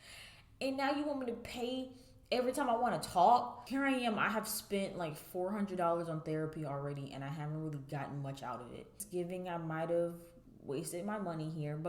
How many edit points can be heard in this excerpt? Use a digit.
2